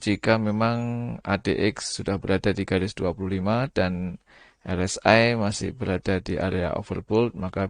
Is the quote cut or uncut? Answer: uncut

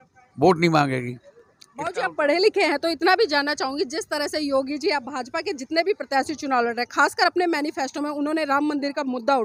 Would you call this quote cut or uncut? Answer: uncut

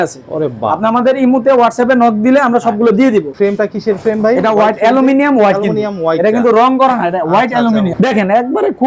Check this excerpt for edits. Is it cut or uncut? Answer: cut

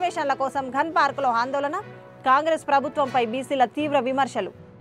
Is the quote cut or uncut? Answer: uncut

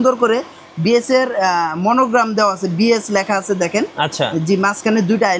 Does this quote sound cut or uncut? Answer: uncut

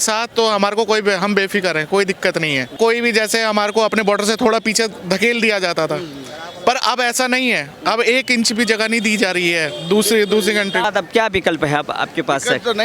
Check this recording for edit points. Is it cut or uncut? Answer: cut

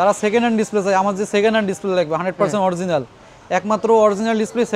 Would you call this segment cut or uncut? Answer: uncut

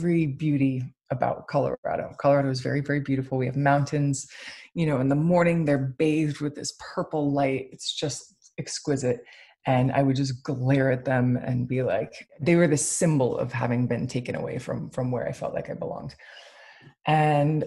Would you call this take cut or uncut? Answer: cut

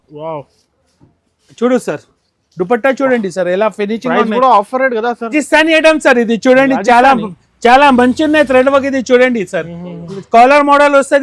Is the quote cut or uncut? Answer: cut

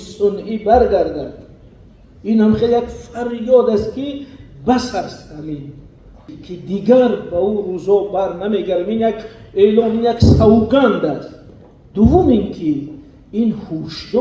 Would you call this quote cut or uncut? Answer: cut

